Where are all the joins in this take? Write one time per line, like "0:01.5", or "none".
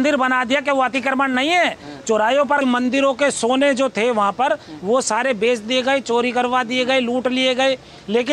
0:02.6